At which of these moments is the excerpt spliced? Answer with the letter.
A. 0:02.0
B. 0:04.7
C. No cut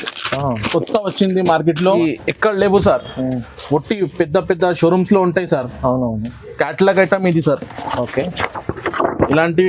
A